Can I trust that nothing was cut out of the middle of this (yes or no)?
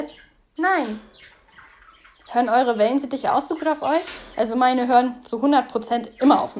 yes